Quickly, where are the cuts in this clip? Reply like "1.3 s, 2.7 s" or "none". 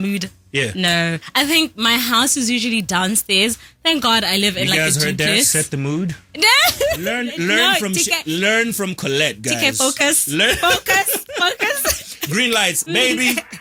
none